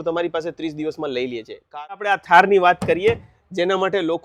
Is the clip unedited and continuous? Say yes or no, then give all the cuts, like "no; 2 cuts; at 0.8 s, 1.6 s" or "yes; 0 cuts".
no; 1 cut; at 2.1 s